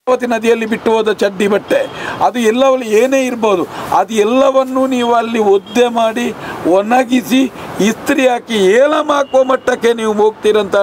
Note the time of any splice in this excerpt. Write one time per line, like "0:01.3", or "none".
none